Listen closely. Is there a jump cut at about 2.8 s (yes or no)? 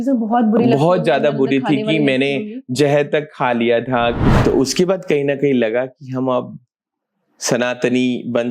no